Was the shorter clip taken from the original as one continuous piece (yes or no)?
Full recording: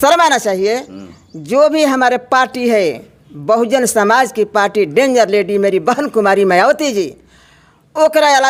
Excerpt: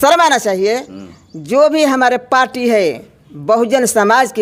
yes